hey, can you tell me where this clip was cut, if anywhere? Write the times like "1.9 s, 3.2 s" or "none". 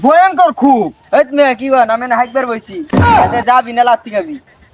none